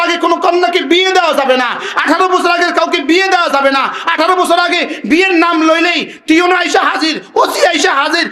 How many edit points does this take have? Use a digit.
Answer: 0